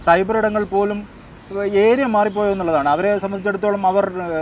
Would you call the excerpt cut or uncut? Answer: uncut